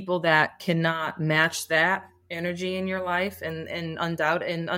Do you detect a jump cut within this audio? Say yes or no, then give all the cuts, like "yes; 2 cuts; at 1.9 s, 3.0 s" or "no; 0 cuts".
no; 0 cuts